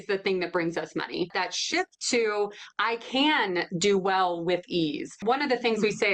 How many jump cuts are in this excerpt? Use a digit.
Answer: 2